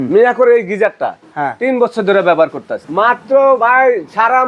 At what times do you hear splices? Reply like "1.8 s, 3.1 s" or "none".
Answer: 2.8 s